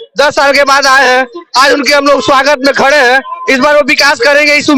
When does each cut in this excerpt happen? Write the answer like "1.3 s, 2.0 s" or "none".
none